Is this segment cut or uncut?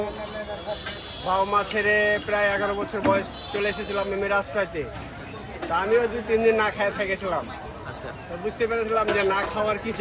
uncut